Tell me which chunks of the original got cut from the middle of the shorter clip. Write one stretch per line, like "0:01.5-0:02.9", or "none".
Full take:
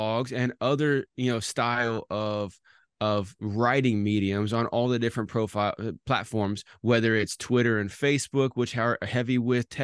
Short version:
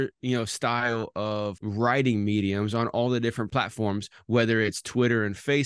0:02.6-0:03.4
0:05.3-0:06.0